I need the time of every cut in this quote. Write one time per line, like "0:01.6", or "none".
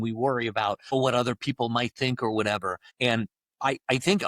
0:00.9
0:02.8